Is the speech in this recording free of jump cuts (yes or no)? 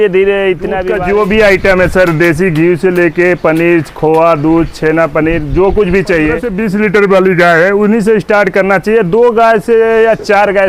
no